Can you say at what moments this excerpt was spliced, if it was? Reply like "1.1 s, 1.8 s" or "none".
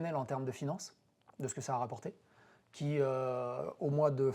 none